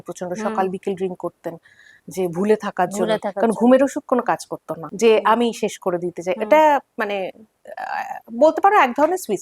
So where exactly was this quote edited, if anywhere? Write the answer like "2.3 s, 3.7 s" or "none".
4.8 s